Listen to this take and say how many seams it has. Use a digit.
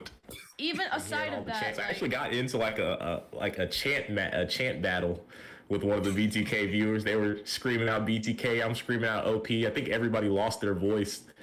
1